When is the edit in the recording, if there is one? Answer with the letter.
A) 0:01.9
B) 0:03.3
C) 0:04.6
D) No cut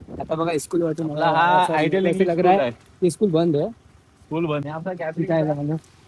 C